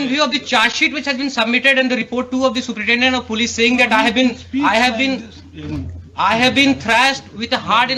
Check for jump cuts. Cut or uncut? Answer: uncut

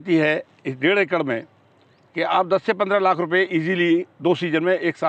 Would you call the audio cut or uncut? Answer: uncut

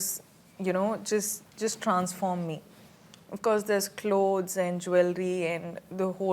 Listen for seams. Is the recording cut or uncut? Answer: uncut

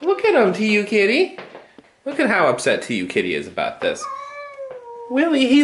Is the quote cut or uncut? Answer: uncut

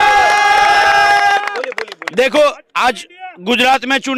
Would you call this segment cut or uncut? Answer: uncut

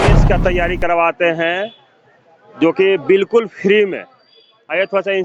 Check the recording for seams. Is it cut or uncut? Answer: uncut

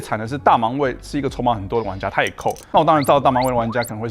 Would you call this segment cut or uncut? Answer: cut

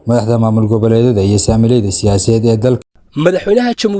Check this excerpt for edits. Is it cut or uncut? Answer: cut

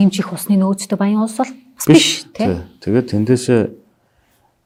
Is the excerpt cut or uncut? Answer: uncut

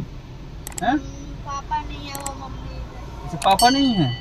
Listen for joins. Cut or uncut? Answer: uncut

